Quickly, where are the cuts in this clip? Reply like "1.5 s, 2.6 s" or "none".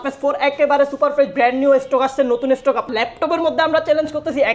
2.9 s